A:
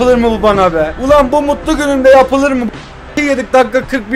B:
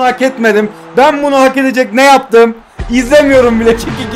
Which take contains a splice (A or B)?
A